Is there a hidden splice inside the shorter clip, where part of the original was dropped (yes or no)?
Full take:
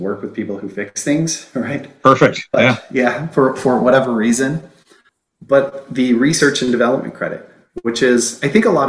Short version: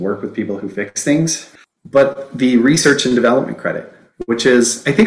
yes